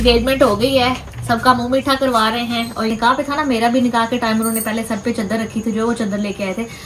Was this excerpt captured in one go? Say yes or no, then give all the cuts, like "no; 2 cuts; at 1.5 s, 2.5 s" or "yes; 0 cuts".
no; 1 cut; at 2.9 s